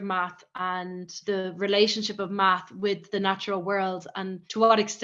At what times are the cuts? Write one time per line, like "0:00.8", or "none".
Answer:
0:01.1